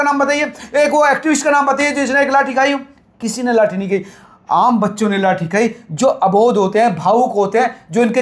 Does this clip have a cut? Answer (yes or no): no